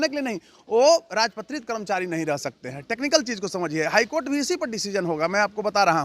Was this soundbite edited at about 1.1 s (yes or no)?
no